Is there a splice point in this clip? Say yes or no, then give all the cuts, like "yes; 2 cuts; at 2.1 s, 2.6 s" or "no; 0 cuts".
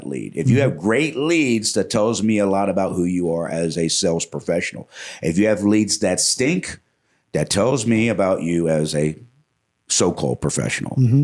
no; 0 cuts